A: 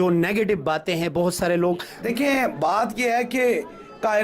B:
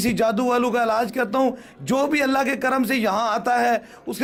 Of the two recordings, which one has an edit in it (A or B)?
A